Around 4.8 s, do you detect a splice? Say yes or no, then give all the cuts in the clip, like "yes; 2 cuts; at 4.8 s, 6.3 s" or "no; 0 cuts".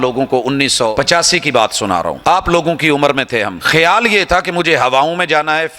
no; 3 cuts; at 0.9 s, 2.2 s, 3.6 s